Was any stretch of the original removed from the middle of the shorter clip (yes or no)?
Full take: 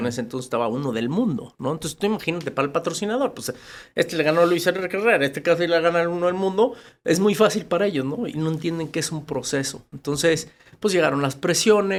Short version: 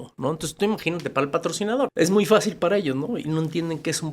yes